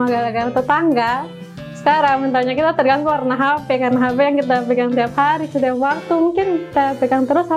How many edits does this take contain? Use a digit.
1